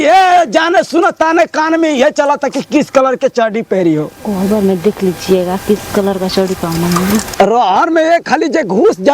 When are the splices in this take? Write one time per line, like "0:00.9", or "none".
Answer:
0:07.3